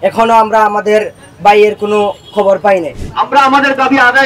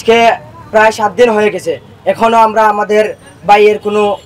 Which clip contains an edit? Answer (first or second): first